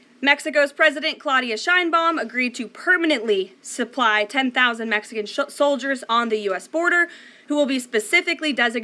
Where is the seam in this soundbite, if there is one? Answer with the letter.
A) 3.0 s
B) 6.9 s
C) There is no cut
A